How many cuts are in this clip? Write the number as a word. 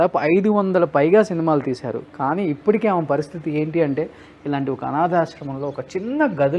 zero